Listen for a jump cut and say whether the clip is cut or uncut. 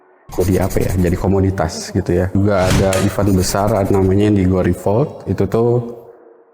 cut